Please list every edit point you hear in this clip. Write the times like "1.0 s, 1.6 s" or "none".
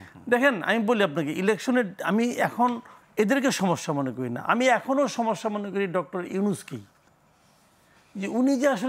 none